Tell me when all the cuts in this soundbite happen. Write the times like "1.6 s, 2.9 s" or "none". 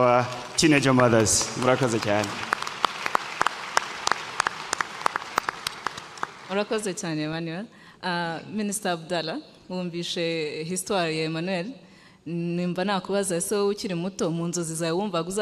none